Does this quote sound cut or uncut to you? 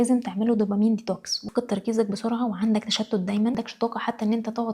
cut